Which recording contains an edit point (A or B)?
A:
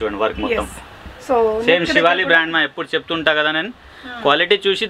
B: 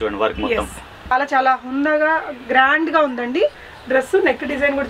B